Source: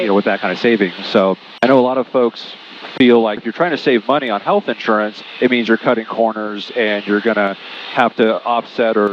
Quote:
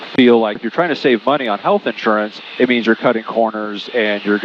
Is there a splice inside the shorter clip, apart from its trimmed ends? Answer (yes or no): no